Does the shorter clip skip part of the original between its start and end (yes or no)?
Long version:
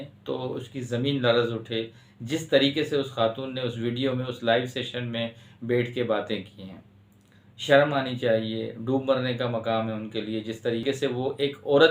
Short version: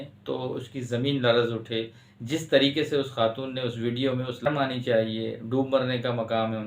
yes